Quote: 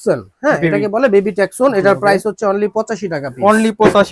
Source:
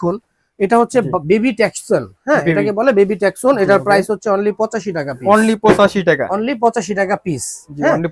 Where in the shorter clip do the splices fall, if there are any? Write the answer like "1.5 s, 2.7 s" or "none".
none